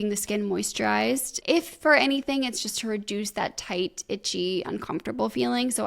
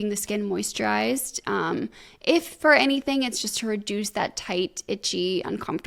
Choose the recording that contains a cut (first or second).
first